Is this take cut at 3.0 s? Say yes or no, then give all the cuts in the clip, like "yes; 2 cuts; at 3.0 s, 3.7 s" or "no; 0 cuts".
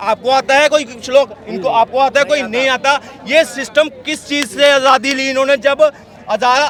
no; 0 cuts